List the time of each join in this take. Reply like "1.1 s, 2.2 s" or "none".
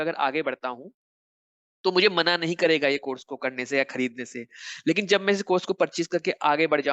none